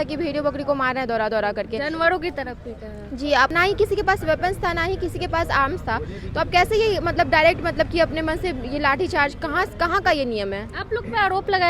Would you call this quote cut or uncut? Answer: cut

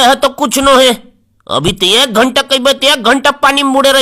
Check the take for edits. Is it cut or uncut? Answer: uncut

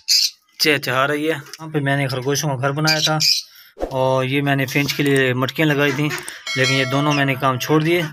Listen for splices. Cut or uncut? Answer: cut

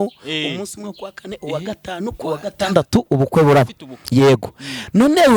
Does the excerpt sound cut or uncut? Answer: uncut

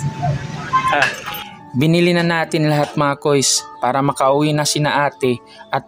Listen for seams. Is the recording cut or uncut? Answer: uncut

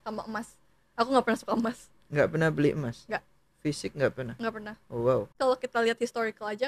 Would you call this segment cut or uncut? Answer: cut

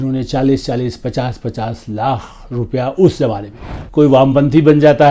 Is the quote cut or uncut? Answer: cut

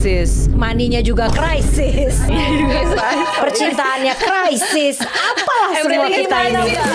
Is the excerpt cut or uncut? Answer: uncut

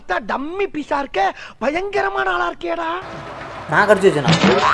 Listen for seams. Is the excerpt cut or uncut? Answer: uncut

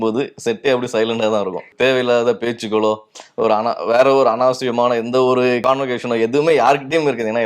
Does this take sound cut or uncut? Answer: cut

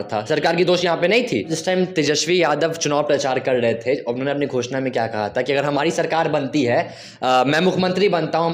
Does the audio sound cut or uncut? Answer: cut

